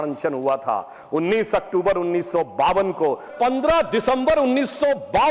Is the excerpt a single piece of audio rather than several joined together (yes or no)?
no